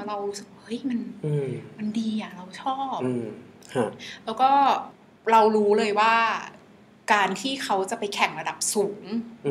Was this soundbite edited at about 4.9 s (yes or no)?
yes